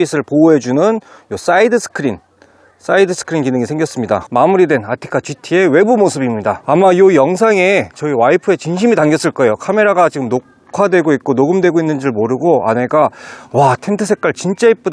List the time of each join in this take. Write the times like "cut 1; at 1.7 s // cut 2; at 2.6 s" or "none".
cut 1; at 4.2 s // cut 2; at 6.6 s